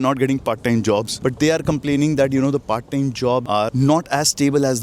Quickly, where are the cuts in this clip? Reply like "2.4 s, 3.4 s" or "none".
1.1 s, 3.6 s